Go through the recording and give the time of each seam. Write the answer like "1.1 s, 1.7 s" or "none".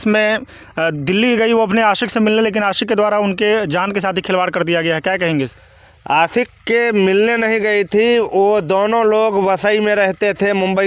none

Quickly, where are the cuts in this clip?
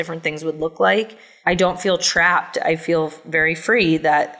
1.2 s

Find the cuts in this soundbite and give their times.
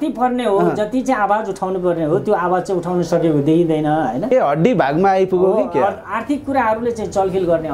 4.3 s

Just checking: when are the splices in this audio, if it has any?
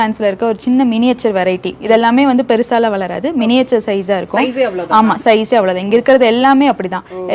none

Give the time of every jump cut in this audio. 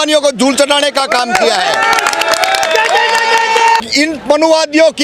3.8 s

